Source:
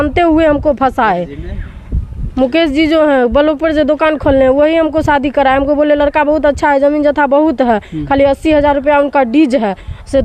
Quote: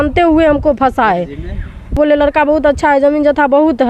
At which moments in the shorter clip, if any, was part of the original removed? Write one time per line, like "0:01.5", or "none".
0:02.0